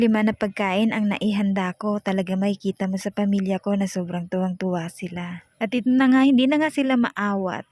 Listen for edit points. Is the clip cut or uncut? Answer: cut